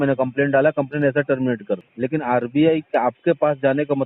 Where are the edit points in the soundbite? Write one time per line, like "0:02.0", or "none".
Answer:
0:01.9